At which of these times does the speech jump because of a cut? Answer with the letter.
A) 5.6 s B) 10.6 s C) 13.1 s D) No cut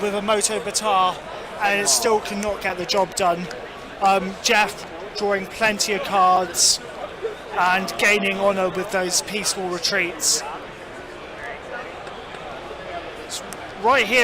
C